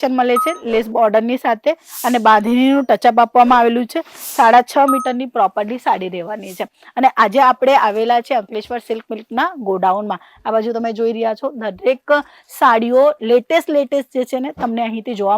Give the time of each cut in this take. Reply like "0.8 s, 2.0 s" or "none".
none